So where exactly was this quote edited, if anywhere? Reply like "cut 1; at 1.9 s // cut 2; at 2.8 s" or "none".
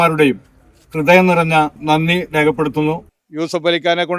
cut 1; at 1.8 s // cut 2; at 3.0 s